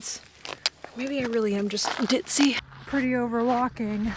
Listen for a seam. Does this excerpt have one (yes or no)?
yes